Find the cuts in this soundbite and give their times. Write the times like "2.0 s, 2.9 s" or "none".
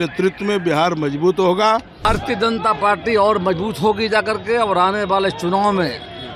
2.1 s